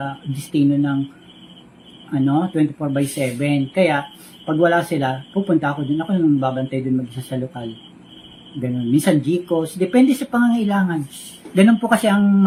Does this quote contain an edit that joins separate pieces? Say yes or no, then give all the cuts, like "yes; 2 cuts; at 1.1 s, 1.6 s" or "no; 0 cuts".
no; 0 cuts